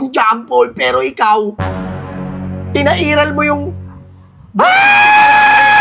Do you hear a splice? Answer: no; 0 cuts

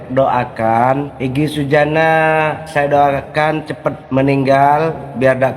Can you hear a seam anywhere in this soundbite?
yes; 3 cuts; at 1.1 s, 2.6 s, 4.0 s

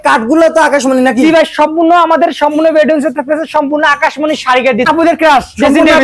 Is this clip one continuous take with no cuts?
no; 1 cut; at 4.9 s

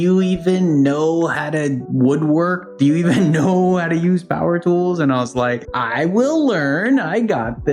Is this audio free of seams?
yes; 0 cuts

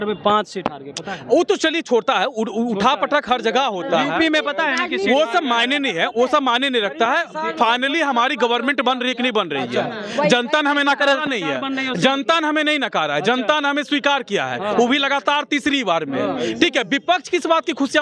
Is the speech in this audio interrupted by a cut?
no; 0 cuts

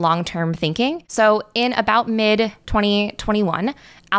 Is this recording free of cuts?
no; 2 cuts; at 1.0 s, 2.6 s

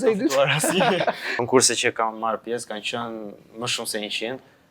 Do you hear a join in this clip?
yes; 1 cut; at 1.4 s

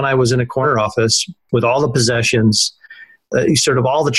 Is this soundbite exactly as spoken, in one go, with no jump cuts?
no; 2 cuts; at 0.9 s, 3.3 s

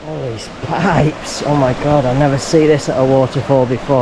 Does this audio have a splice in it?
no; 0 cuts

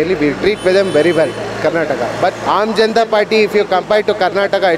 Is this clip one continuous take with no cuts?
no; 1 cut; at 2.4 s

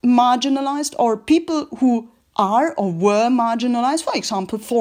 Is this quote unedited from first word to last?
yes; 0 cuts

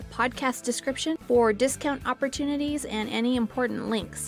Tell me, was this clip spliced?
no; 0 cuts

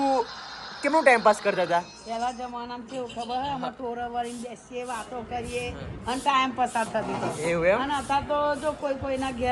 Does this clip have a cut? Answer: no; 0 cuts

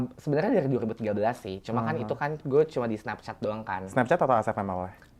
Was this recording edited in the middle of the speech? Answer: no; 0 cuts

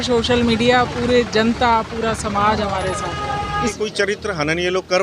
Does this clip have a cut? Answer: yes; 1 cut; at 3.7 s

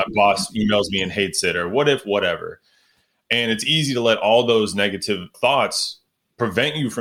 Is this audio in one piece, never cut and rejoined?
no; 1 cut; at 5.3 s

